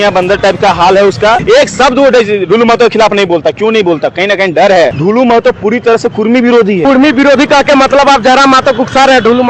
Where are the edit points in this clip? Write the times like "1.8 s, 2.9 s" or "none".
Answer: 1.4 s, 4.9 s, 6.8 s